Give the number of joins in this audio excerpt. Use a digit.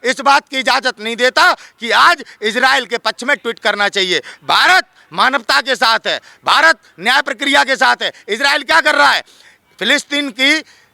0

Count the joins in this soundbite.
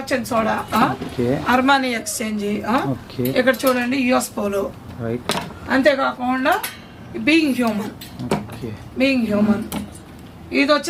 0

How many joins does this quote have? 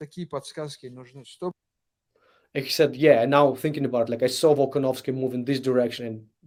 0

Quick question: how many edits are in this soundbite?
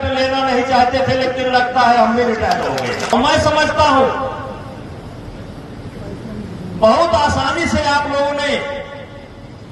1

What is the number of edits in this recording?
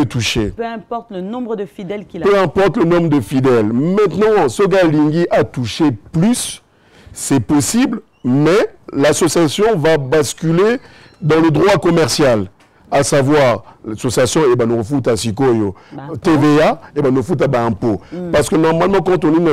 0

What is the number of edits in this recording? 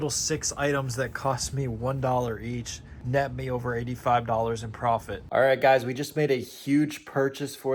1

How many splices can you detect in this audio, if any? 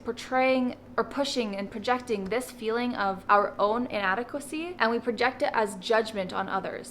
2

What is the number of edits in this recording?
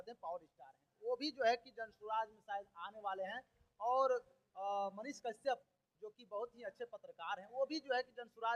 0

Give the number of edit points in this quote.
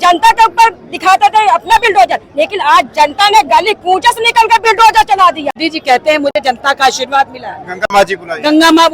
1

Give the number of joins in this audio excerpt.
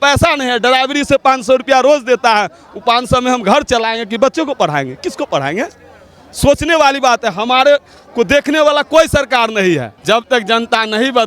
1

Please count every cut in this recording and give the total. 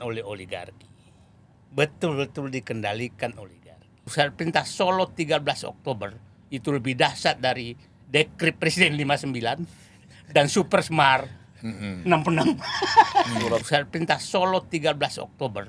2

